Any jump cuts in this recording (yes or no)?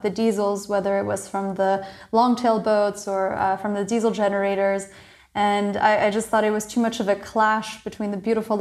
no